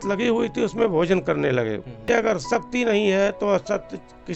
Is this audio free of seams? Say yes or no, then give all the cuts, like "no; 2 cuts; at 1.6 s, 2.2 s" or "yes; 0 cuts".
no; 1 cut; at 2.0 s